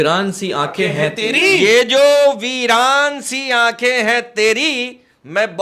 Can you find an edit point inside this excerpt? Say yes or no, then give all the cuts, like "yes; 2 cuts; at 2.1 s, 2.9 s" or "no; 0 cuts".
no; 0 cuts